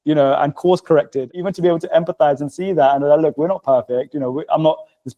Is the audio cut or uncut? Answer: cut